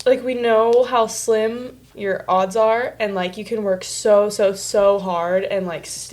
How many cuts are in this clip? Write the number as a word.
one